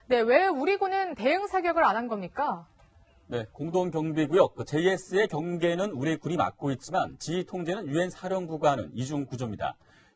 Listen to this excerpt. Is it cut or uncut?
uncut